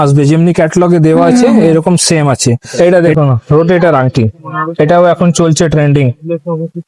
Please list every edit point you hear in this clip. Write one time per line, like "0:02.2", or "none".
0:02.7